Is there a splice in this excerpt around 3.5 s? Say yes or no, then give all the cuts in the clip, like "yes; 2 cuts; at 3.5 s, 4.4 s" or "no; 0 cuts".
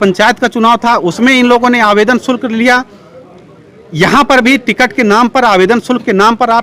no; 0 cuts